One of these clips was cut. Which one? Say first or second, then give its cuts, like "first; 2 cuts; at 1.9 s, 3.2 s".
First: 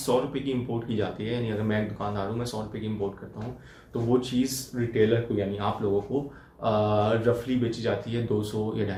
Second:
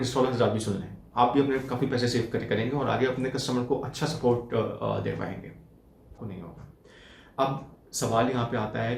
second; 1 cut; at 6.2 s